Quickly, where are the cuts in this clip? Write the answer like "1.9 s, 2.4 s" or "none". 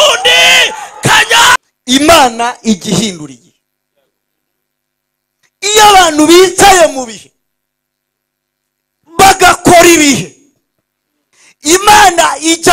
1.7 s